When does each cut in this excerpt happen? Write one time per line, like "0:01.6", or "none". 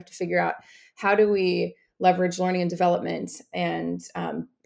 none